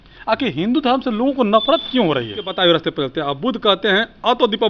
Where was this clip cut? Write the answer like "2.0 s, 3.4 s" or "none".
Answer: 2.5 s